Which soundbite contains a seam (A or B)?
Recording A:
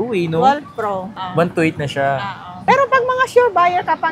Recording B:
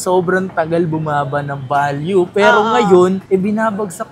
A